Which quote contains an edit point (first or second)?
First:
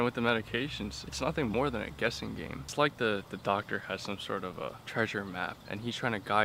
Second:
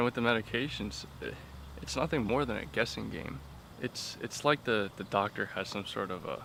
first